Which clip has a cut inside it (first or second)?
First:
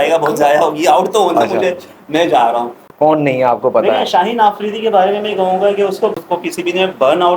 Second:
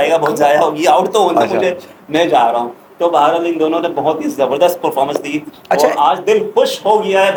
first